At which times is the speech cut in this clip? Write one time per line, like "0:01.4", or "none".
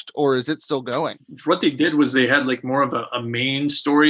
0:01.1